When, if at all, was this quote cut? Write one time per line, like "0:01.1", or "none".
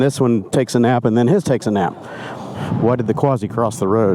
0:02.5